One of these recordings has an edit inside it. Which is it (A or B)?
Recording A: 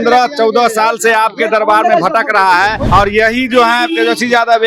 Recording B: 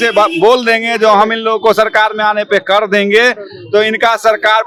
A